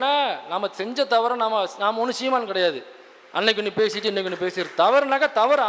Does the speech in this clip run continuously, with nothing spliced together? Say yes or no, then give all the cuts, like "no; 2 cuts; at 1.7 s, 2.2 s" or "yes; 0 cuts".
yes; 0 cuts